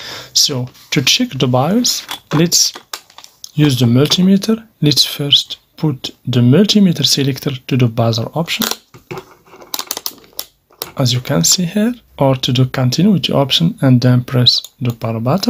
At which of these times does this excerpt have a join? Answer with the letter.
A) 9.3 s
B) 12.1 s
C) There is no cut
B